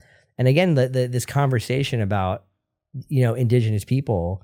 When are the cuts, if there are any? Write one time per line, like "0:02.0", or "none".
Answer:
none